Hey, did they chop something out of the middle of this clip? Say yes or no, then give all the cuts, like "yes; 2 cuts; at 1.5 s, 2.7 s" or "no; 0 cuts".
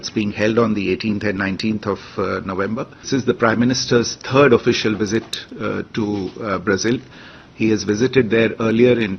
yes; 1 cut; at 3.1 s